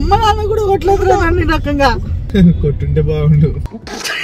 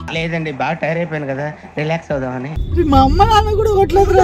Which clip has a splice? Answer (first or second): first